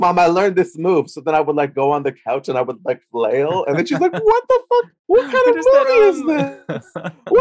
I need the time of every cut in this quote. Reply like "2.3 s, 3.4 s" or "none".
5.0 s